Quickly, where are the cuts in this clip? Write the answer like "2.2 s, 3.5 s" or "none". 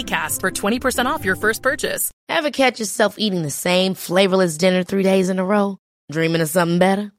2.1 s